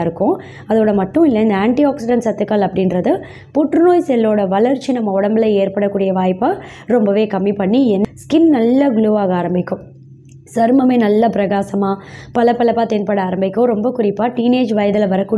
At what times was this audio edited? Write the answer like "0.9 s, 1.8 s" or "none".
8.0 s